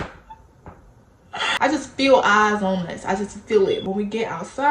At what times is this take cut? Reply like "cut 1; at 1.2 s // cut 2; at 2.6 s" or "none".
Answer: cut 1; at 1.5 s // cut 2; at 3.9 s